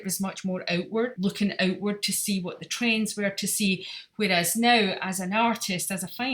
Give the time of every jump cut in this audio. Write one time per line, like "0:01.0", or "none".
0:01.1